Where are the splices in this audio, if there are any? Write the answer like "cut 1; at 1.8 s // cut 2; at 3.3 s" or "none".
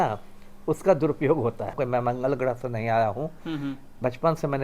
cut 1; at 1.7 s